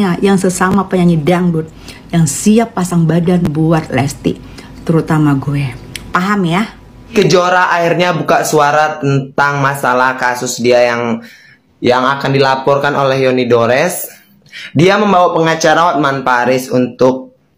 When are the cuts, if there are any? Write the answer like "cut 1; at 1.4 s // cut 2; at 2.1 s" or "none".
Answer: cut 1; at 7.1 s